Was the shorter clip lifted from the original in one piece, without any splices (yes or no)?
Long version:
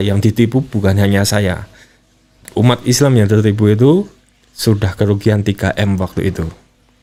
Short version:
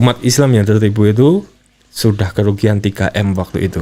yes